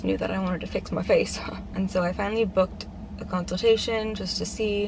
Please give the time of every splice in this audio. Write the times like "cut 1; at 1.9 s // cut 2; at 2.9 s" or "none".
none

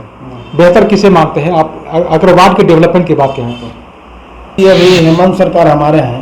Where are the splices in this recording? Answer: cut 1; at 4.6 s

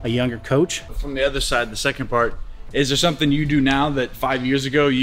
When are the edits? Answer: cut 1; at 0.9 s

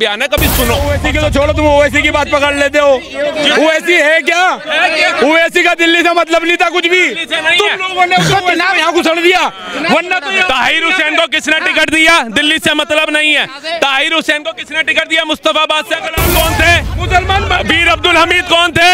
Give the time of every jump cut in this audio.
cut 1; at 1.0 s // cut 2; at 16.1 s

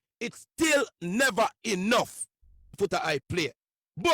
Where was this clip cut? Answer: cut 1; at 2.8 s

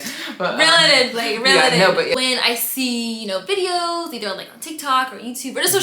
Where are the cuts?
cut 1; at 2.1 s

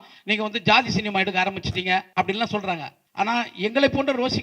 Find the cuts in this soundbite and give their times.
cut 1; at 2.1 s // cut 2; at 3.0 s

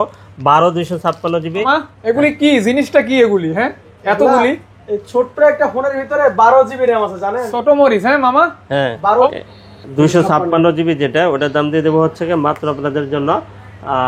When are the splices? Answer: cut 1; at 1.6 s // cut 2; at 9.3 s

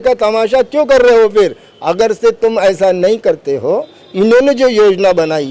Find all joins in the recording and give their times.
none

